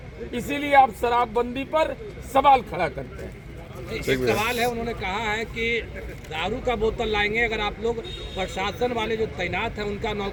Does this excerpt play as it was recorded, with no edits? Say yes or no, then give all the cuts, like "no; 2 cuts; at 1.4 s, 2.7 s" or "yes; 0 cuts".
yes; 0 cuts